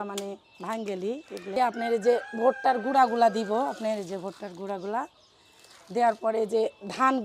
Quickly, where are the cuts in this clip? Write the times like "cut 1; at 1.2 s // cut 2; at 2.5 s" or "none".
cut 1; at 1.6 s